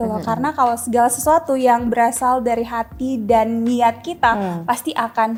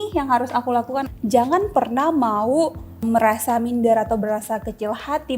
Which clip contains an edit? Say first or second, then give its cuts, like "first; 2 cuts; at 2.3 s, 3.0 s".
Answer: second; 2 cuts; at 1.1 s, 3.0 s